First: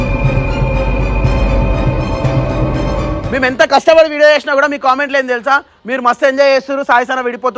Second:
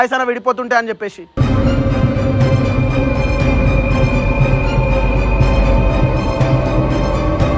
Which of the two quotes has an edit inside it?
first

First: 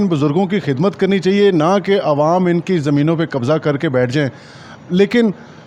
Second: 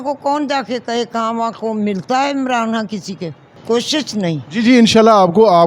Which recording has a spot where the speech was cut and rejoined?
second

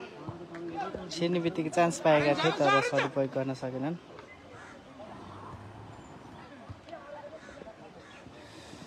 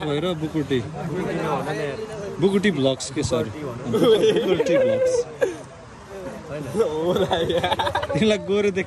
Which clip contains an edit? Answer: first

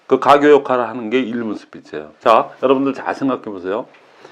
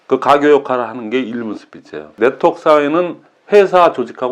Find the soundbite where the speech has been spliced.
second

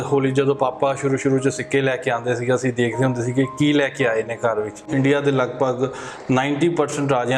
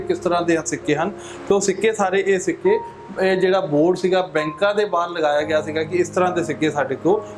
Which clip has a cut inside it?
first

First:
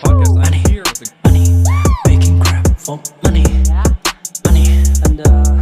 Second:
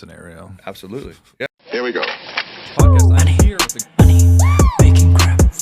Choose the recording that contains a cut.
second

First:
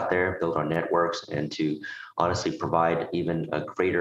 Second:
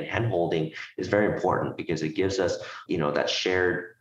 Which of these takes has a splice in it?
second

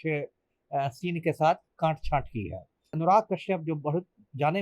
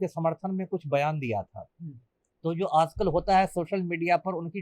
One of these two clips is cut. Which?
first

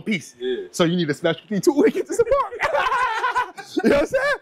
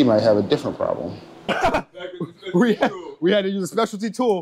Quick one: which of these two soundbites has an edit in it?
second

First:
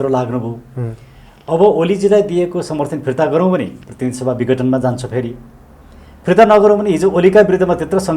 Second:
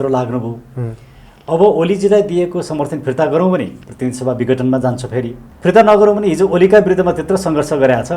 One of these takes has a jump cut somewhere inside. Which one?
second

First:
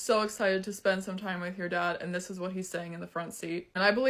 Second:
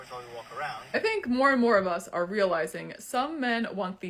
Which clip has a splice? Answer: second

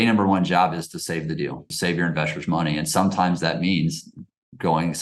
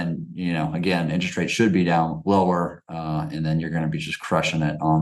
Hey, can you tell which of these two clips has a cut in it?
first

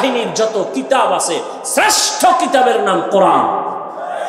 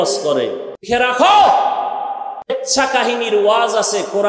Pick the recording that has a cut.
second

